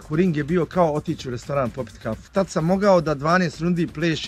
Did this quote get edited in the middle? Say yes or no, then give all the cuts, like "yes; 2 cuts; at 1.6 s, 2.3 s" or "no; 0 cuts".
yes; 1 cut; at 2.2 s